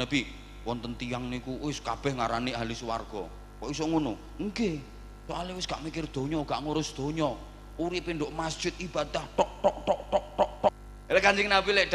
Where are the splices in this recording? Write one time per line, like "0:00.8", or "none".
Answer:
0:10.8